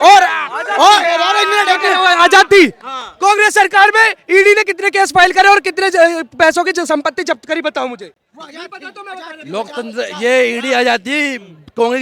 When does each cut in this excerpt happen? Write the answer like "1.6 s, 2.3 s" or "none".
none